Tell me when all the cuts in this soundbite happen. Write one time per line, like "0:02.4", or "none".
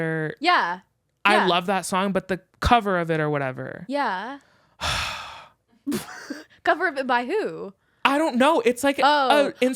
0:02.5